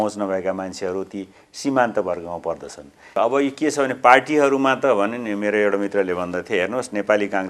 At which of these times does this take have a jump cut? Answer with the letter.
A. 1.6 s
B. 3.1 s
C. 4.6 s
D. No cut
B